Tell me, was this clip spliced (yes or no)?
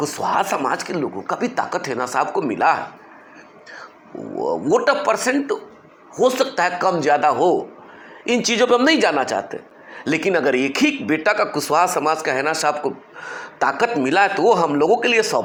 no